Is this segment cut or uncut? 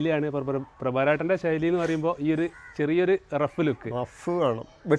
uncut